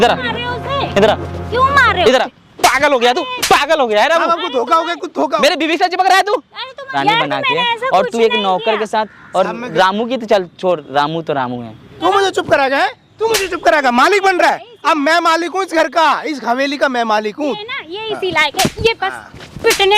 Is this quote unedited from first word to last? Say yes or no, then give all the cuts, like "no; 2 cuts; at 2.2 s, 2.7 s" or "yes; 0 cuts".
no; 3 cuts; at 2.4 s, 6.9 s, 11.9 s